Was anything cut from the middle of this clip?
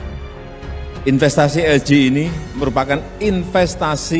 yes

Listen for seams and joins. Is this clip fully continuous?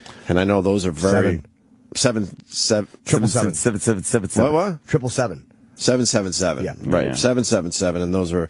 yes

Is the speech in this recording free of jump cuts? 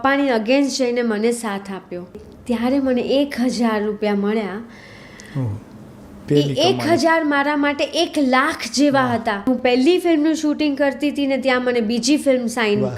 no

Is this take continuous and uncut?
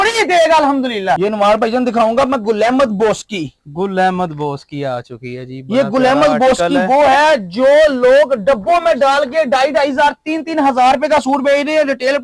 yes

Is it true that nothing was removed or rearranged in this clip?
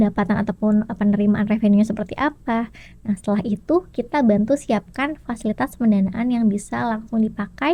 yes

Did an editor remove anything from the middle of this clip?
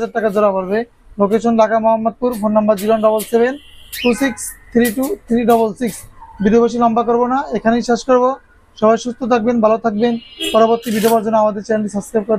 no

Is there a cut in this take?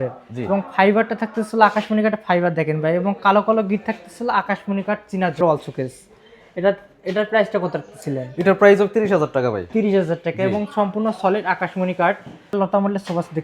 yes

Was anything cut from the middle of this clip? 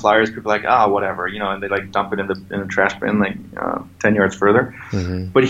no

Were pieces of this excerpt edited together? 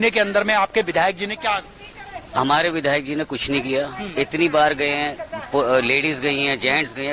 no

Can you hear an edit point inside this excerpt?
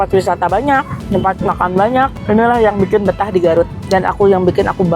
yes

